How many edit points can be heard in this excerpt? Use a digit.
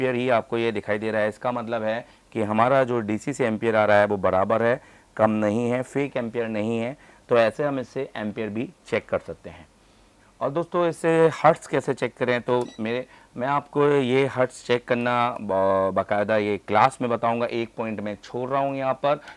0